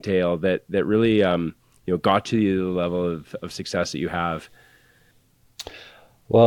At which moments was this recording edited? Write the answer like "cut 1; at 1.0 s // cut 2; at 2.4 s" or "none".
none